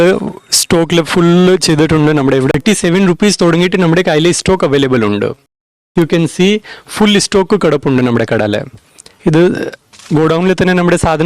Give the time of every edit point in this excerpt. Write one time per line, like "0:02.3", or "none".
0:02.5
0:05.7